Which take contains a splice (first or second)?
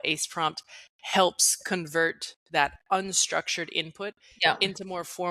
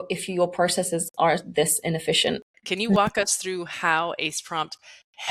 second